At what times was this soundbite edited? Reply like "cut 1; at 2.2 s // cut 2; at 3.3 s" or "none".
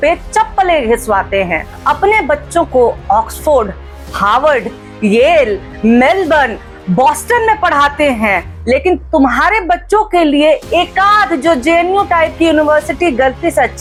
none

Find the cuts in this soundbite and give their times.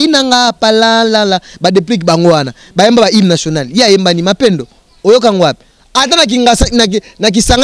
none

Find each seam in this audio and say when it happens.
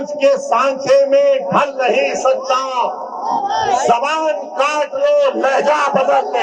none

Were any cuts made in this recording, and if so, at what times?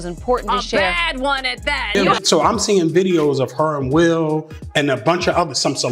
cut 1; at 2.1 s

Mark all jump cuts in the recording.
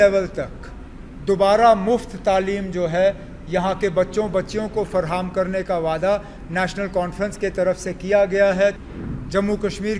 cut 1; at 8.8 s

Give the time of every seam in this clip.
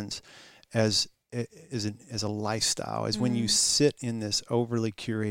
none

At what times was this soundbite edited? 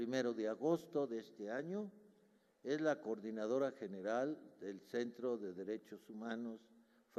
none

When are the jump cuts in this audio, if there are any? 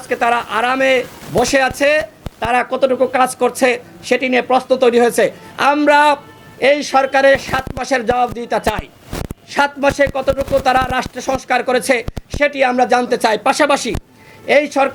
none

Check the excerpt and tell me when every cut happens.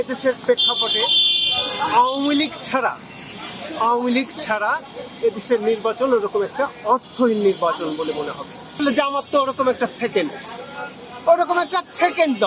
cut 1; at 8.8 s

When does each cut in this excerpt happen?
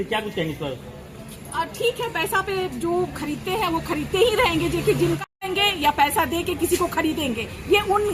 cut 1; at 5.3 s

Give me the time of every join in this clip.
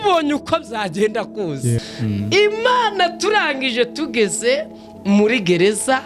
cut 1; at 1.8 s

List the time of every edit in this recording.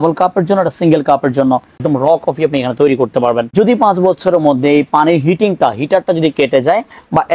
cut 1; at 1.8 s // cut 2; at 3.5 s

